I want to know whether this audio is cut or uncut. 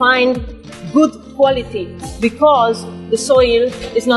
uncut